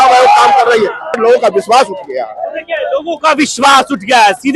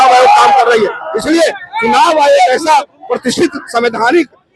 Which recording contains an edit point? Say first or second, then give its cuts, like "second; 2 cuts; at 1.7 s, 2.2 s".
first; 1 cut; at 1.2 s